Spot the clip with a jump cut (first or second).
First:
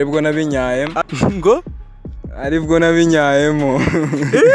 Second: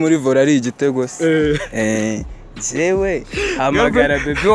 first